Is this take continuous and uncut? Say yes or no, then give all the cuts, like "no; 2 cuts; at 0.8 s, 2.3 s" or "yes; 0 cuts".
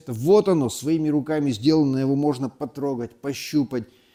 yes; 0 cuts